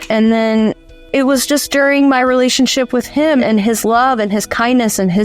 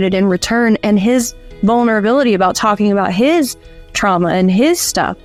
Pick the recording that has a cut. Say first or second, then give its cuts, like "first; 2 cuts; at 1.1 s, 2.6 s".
first; 2 cuts; at 0.9 s, 3.4 s